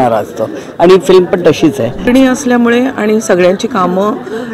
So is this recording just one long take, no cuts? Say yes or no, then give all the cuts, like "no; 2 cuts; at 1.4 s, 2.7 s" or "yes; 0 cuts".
no; 1 cut; at 2.0 s